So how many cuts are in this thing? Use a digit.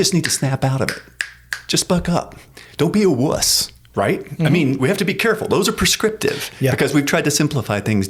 0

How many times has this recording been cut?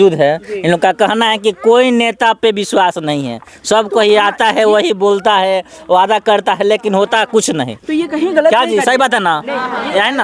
0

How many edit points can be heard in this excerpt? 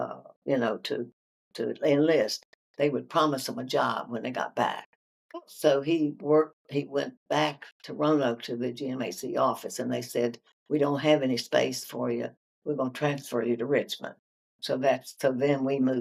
0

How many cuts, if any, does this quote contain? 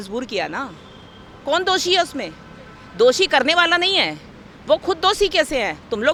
0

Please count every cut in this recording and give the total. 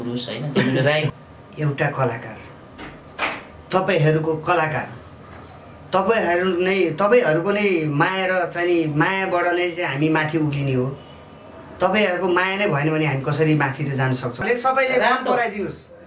2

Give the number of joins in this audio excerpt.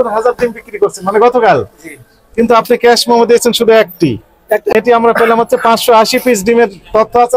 1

